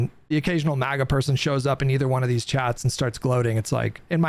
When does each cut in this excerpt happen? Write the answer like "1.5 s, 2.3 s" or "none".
none